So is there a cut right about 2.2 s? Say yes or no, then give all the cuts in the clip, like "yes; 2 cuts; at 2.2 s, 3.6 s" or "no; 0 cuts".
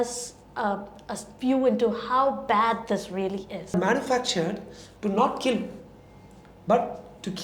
no; 1 cut; at 3.7 s